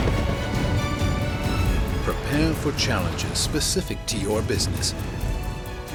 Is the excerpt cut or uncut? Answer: uncut